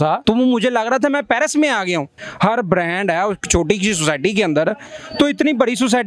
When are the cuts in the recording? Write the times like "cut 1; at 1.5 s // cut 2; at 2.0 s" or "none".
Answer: cut 1; at 2.1 s

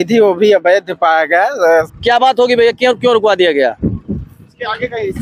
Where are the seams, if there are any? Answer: cut 1; at 1.9 s

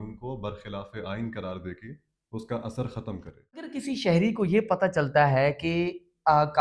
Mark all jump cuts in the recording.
cut 1; at 3.8 s

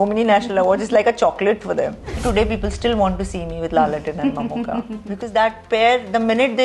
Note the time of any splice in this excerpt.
cut 1; at 2.2 s

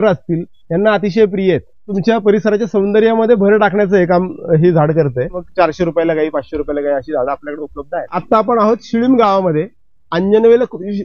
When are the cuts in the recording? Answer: cut 1; at 1.9 s // cut 2; at 5.4 s // cut 3; at 8.2 s

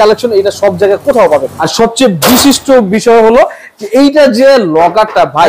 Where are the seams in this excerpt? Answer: cut 1; at 1.6 s

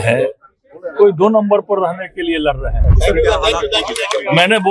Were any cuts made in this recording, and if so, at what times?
cut 1; at 2.9 s

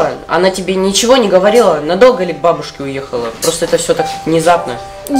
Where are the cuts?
none

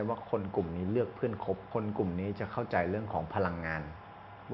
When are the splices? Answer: cut 1; at 1.7 s

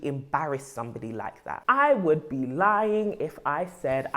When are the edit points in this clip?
cut 1; at 1.6 s

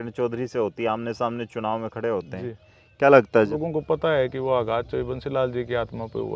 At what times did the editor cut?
cut 1; at 3.5 s

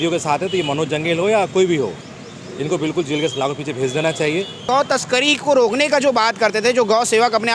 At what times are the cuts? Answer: cut 1; at 4.6 s

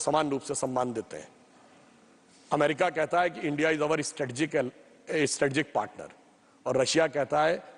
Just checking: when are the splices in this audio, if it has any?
none

